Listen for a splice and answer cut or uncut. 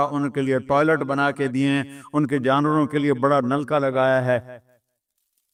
uncut